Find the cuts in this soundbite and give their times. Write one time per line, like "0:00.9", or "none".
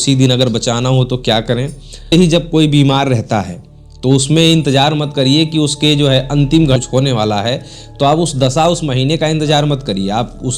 0:02.1
0:06.8

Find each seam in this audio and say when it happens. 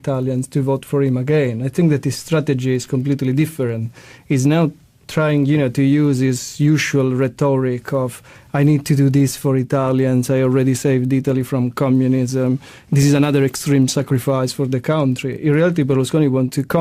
0:10.8

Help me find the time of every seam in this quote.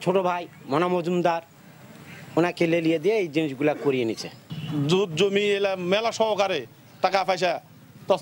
0:04.3

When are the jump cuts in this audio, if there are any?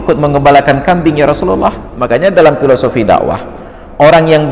0:01.9

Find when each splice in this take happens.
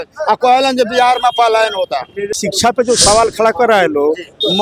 0:02.3

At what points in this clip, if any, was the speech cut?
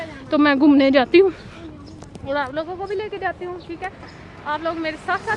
none

